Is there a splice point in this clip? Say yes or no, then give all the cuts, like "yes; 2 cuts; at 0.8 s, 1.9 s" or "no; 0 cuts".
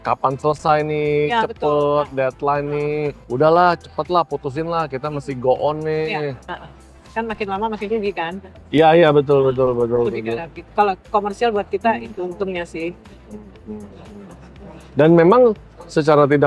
no; 0 cuts